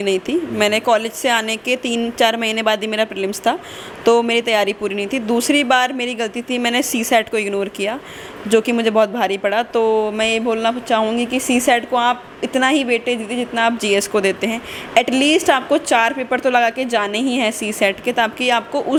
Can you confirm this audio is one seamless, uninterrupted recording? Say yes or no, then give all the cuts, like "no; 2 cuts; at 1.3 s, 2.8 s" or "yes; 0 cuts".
yes; 0 cuts